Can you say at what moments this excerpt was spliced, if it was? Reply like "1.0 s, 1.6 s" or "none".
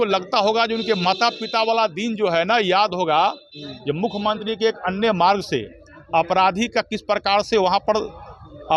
none